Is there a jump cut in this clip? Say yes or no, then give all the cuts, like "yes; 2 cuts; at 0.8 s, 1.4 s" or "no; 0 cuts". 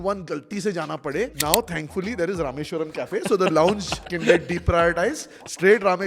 yes; 2 cuts; at 1.4 s, 4.0 s